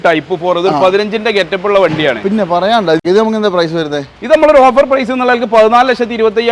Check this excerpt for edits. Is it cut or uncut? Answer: cut